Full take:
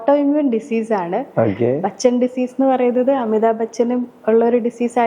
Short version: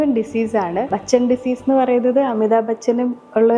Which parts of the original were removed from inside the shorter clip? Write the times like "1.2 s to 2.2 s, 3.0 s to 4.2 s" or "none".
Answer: 1.3 s to 1.8 s